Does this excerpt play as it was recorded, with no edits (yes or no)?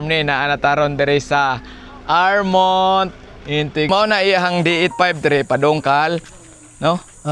no